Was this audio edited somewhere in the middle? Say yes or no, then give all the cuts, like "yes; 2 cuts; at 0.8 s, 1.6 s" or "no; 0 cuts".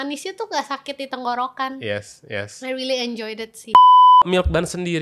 yes; 2 cuts; at 3.7 s, 4.2 s